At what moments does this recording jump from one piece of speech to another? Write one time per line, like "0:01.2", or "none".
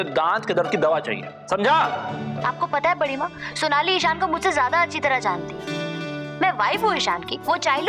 0:02.3